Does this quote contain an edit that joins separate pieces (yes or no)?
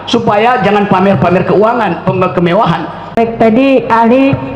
yes